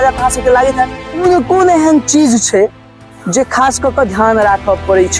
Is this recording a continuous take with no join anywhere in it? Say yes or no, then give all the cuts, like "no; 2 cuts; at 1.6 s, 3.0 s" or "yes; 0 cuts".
no; 1 cut; at 1.2 s